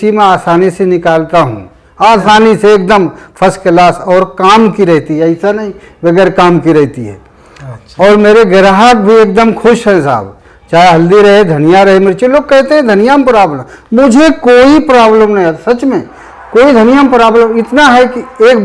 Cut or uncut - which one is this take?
uncut